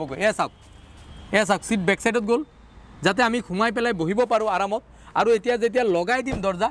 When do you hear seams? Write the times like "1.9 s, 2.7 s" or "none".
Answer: none